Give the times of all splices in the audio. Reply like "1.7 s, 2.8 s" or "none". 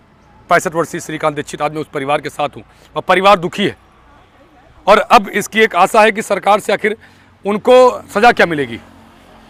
none